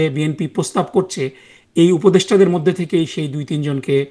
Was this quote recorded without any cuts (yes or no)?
yes